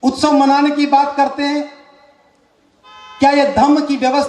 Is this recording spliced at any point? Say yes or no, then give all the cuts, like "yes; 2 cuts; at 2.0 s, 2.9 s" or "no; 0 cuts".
no; 0 cuts